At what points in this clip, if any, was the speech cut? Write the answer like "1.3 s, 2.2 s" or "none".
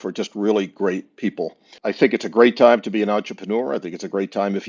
1.7 s